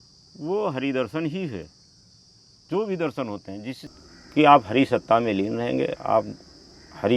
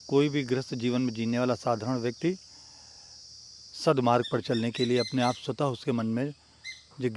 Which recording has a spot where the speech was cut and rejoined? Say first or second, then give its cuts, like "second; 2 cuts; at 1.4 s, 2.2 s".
first; 1 cut; at 3.9 s